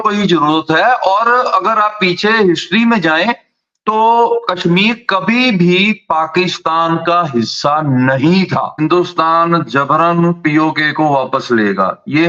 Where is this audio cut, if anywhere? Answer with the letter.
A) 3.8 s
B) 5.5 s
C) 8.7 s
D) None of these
C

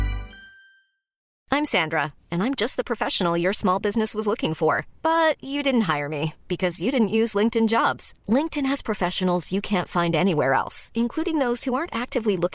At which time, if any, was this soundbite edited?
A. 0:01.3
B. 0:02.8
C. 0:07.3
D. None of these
A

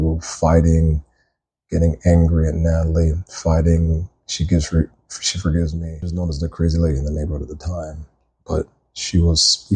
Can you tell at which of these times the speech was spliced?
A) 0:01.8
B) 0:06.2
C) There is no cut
B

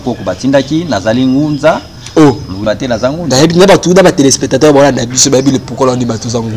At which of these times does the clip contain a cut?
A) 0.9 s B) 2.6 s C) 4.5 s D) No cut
B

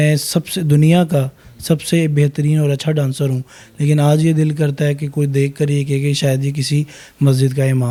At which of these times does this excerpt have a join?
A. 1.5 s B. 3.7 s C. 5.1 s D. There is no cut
D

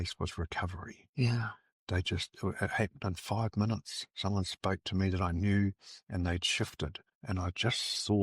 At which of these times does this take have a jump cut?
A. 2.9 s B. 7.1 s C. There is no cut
B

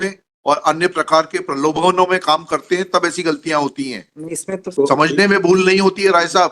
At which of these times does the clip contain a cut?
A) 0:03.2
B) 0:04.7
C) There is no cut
B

